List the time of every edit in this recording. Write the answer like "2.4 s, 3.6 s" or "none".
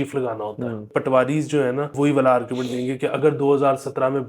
0.9 s, 1.9 s